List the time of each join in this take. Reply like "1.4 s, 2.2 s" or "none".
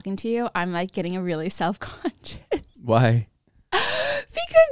none